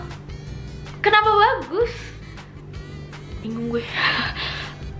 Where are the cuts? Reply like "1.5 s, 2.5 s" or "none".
none